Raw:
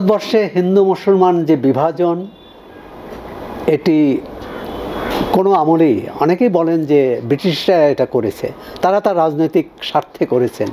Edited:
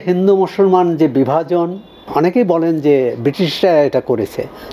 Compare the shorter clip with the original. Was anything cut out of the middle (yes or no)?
yes